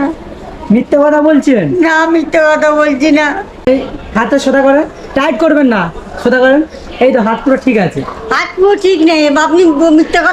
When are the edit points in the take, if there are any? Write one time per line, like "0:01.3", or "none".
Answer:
0:03.7